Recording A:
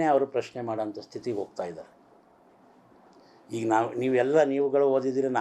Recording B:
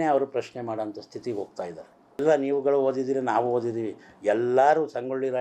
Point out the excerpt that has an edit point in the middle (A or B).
B